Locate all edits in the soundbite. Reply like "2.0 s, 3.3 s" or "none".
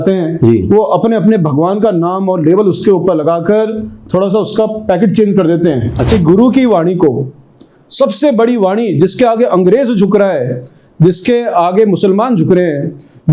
6.1 s